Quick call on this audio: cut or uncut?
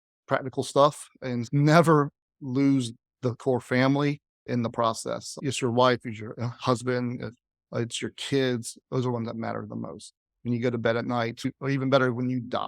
cut